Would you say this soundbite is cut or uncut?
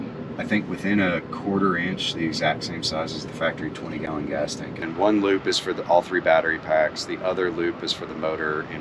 cut